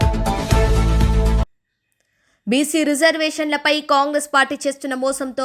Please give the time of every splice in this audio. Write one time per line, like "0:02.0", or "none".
0:01.4